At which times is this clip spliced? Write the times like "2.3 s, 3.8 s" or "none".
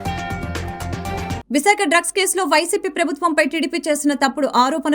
1.2 s